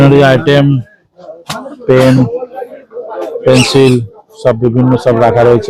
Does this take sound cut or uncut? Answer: uncut